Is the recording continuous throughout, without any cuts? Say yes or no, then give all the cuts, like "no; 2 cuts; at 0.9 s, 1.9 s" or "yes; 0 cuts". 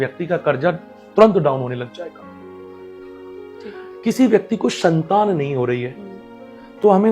yes; 0 cuts